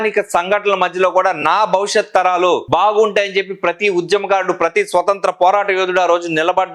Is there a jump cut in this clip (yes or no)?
no